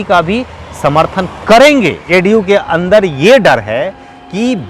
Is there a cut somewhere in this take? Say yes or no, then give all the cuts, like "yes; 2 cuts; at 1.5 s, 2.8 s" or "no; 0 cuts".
yes; 1 cut; at 2.0 s